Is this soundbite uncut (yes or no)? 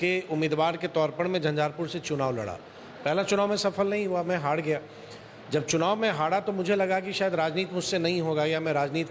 yes